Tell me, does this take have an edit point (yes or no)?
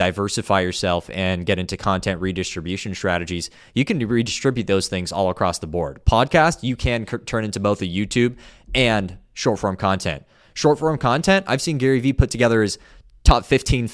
no